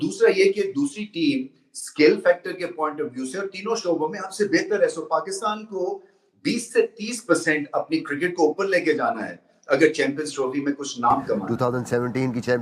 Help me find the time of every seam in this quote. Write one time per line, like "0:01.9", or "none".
0:11.4